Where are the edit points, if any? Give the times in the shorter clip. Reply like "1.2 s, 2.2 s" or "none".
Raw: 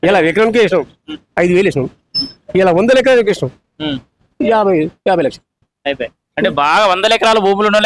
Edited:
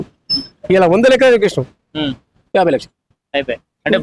2.4 s